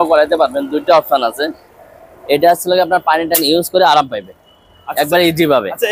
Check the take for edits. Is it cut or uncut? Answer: uncut